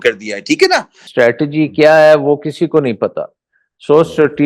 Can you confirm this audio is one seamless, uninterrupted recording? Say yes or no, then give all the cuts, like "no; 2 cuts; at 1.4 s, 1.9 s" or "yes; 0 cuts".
no; 1 cut; at 1.0 s